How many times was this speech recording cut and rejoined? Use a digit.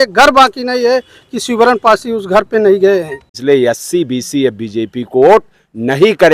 1